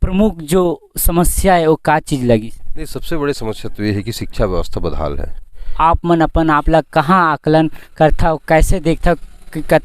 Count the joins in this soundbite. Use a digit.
1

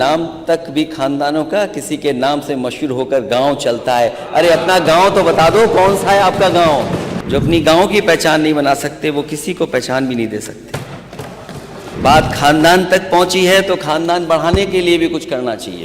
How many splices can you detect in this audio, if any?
2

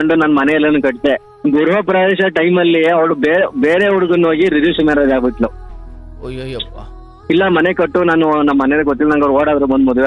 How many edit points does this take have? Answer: 1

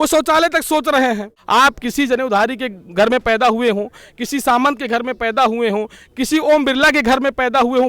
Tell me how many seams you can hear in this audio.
1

